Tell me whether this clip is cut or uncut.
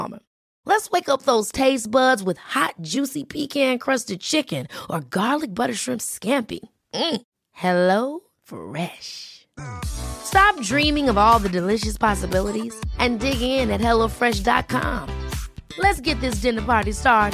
uncut